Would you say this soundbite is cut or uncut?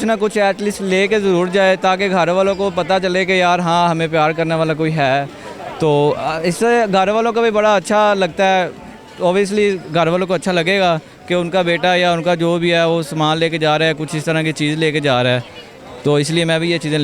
uncut